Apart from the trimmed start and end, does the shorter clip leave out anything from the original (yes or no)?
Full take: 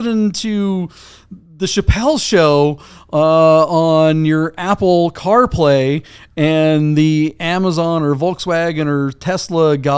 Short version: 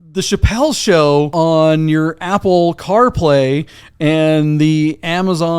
yes